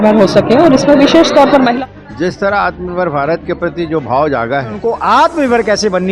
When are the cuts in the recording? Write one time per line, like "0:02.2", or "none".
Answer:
0:01.7
0:04.8

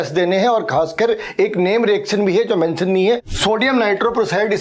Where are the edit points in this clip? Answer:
0:03.3

